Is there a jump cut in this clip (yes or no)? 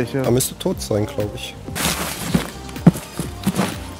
yes